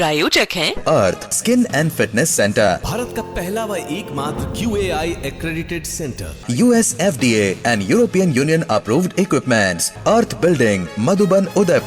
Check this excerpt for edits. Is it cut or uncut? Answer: uncut